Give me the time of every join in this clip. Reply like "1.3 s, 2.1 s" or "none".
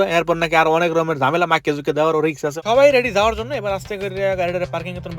2.6 s